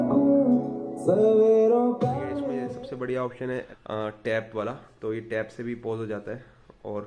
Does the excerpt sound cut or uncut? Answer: cut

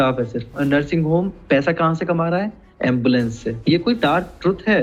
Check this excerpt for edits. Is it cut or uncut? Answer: uncut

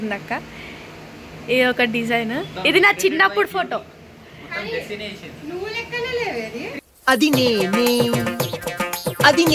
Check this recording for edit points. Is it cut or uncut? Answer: uncut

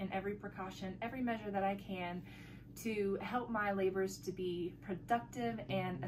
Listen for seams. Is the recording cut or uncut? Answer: uncut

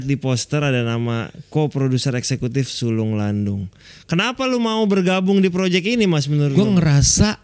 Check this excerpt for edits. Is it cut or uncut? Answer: cut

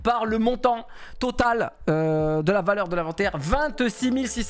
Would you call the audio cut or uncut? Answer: uncut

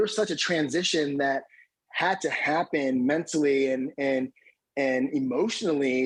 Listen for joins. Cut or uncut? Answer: uncut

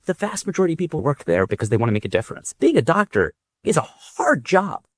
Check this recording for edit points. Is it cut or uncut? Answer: cut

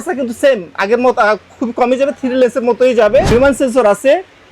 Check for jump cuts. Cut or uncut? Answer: cut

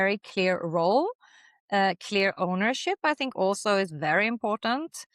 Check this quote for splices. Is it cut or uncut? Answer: uncut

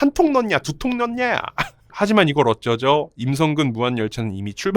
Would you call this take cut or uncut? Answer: cut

